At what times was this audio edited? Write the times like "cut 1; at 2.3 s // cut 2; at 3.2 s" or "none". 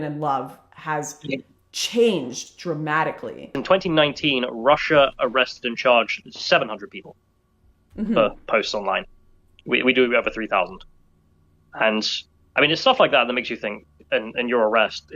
cut 1; at 3.5 s